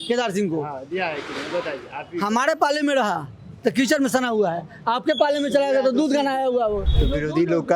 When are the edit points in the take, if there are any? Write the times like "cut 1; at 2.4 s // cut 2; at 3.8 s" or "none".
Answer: cut 1; at 6.9 s